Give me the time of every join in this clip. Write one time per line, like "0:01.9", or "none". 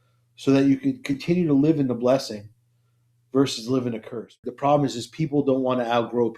0:04.5